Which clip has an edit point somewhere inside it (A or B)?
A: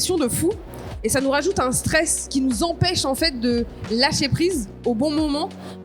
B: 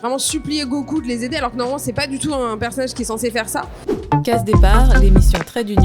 B